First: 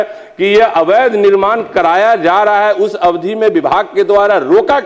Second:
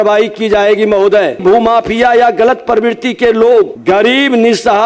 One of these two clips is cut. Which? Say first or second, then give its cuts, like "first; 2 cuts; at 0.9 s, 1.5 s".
second; 2 cuts; at 1.4 s, 3.8 s